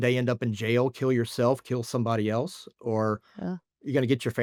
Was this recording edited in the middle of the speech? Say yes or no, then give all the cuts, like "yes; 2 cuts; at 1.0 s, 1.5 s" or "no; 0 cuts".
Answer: no; 0 cuts